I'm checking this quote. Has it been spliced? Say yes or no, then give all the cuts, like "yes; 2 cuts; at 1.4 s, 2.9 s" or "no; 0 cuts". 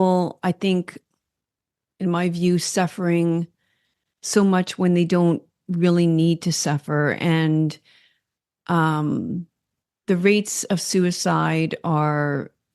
no; 0 cuts